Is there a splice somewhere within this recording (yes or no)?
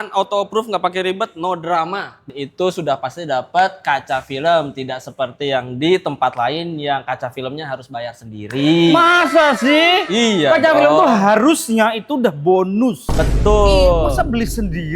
yes